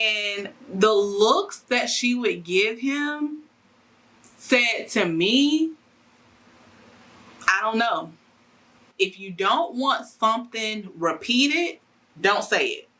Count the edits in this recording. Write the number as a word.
one